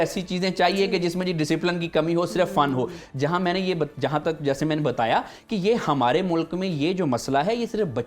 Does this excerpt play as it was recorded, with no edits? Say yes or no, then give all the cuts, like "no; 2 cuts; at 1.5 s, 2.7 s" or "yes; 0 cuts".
yes; 0 cuts